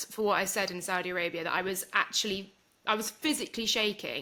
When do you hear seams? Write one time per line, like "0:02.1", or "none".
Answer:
none